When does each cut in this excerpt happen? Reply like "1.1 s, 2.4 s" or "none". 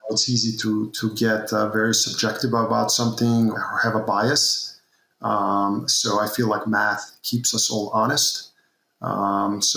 0.9 s, 3.6 s